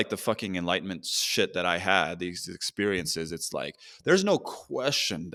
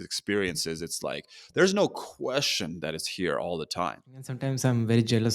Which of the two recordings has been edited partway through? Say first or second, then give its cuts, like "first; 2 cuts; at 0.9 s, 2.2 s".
second; 1 cut; at 4.4 s